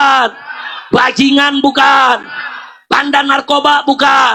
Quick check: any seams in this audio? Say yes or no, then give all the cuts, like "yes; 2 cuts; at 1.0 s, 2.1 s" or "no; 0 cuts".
no; 0 cuts